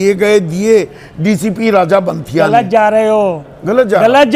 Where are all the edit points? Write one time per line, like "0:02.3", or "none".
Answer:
none